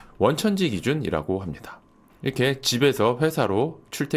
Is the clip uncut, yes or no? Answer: yes